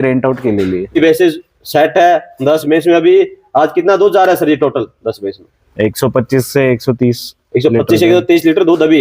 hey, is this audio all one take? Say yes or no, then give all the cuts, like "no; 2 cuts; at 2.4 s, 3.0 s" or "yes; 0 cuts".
no; 1 cut; at 1.0 s